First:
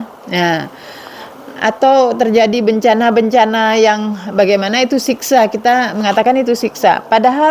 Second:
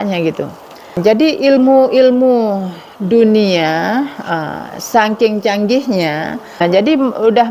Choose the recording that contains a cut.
second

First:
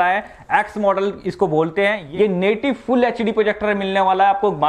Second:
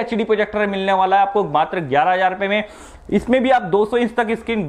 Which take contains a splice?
first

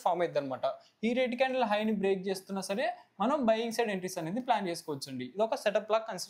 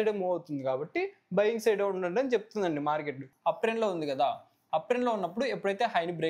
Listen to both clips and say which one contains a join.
second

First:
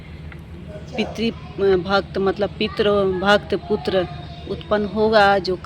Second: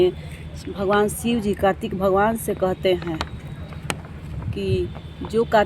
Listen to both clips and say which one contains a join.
second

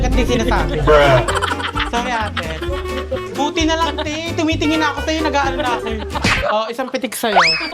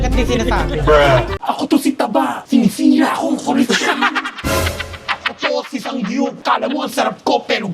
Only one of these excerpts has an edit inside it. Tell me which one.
second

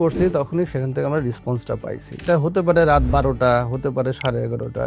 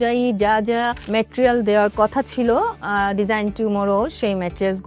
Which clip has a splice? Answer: first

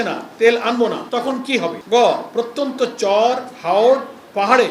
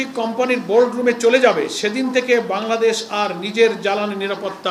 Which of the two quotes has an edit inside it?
first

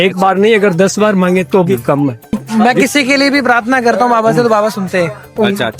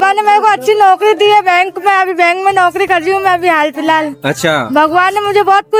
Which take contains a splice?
first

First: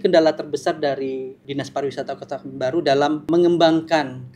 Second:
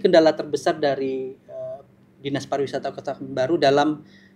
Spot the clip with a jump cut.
first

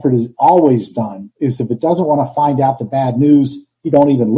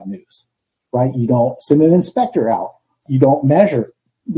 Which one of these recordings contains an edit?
second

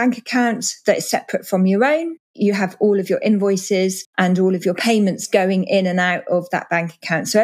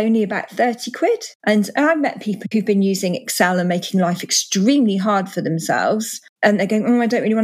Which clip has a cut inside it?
second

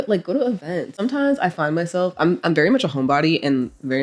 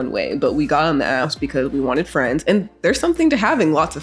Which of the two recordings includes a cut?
first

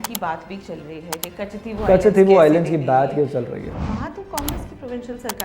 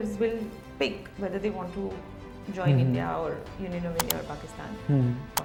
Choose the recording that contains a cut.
first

